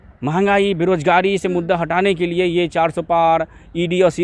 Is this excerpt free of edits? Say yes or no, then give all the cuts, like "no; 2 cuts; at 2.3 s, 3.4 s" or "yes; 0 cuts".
yes; 0 cuts